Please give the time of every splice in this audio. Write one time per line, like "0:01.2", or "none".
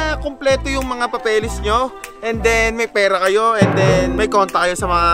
none